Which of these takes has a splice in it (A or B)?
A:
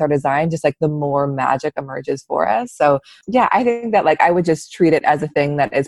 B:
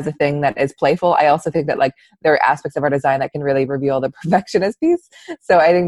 A